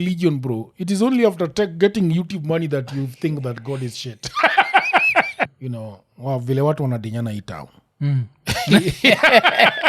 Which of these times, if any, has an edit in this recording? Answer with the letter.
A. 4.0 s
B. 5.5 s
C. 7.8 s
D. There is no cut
B